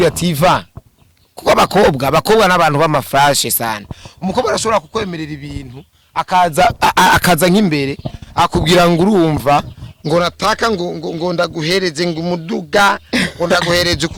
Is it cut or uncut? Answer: uncut